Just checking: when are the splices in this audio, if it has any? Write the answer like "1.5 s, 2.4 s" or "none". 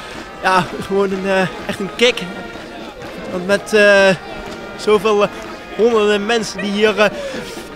none